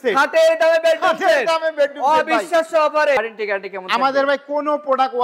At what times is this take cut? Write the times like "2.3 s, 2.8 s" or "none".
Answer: 3.2 s